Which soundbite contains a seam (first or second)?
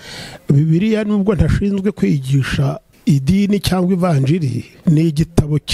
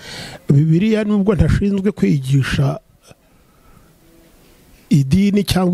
first